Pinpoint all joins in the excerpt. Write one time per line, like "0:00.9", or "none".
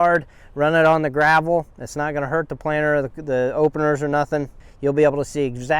0:04.6

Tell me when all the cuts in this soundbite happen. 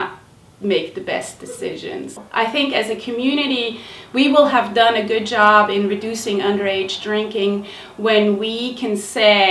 0:02.2

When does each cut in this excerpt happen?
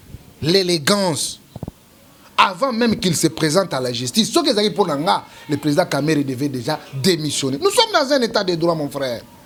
none

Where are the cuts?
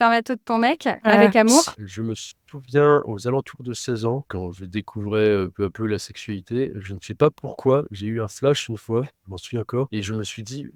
0:01.7

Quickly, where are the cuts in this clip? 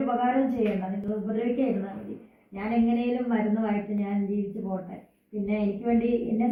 none

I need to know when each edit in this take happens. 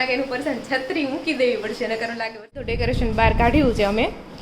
0:02.7

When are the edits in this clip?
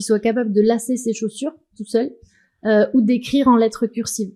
none

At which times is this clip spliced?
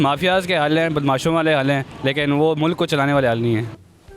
0:01.9

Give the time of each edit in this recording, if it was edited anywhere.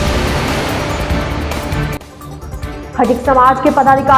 0:02.9

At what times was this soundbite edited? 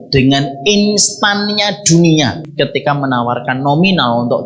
0:02.4

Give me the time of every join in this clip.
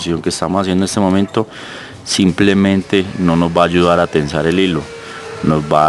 none

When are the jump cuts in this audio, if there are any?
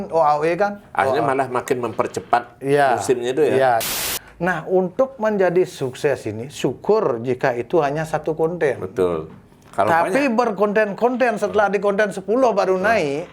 0:03.9

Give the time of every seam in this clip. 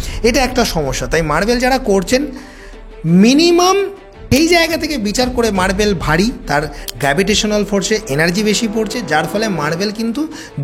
0:04.2

